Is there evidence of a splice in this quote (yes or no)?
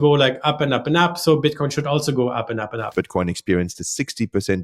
yes